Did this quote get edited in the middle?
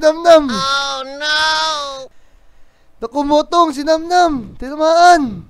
no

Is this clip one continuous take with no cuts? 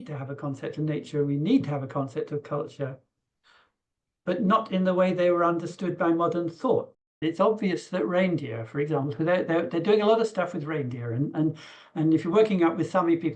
no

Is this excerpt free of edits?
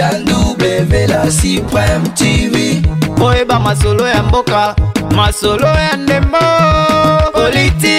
yes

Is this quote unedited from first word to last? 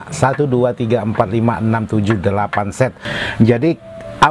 no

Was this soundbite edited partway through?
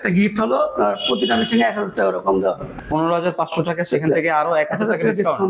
yes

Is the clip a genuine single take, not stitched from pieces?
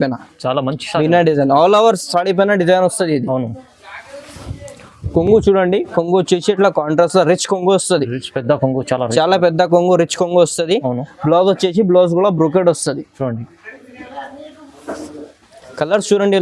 yes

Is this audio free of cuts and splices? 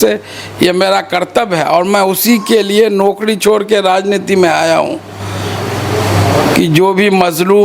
yes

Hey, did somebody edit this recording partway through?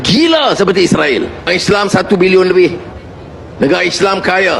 yes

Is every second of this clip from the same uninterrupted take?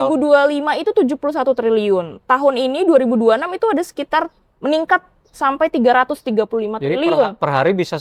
yes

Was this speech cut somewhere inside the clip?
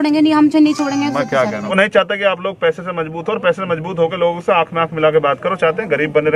yes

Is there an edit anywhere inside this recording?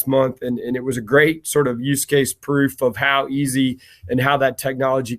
no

